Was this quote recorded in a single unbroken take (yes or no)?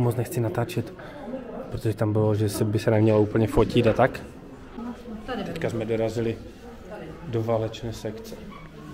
yes